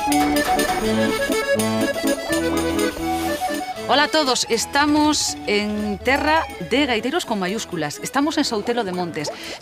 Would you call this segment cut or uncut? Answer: uncut